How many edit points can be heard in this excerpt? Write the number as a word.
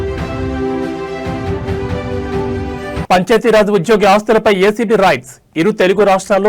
one